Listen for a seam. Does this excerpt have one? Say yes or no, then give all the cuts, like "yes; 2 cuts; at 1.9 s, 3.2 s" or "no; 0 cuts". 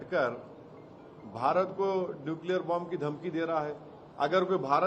no; 0 cuts